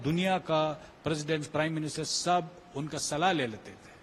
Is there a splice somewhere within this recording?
no; 0 cuts

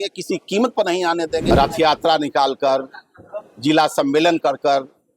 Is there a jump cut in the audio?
yes; 1 cut; at 1.4 s

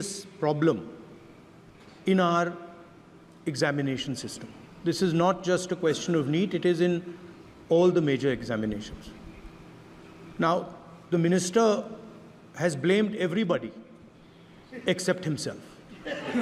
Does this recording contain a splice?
no; 0 cuts

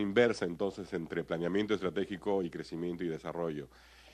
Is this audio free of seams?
no; 1 cut; at 1.1 s

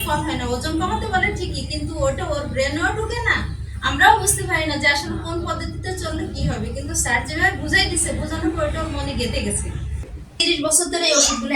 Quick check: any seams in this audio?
yes; 1 cut; at 10.3 s

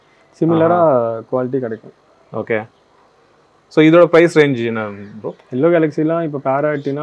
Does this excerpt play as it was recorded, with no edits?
yes; 0 cuts

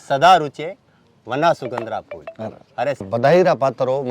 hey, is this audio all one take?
no; 1 cut; at 3.1 s

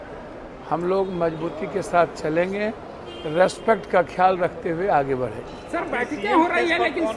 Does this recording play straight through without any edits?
yes; 0 cuts

